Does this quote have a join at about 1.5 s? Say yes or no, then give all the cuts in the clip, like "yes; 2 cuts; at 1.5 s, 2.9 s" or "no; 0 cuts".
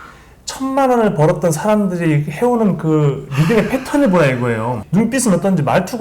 no; 1 cut; at 4.8 s